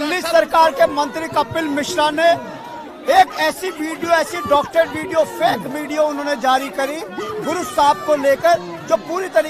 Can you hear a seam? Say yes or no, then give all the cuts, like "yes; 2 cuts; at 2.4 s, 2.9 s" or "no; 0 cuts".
no; 0 cuts